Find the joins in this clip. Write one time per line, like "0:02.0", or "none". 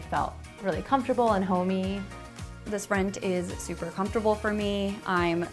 0:02.7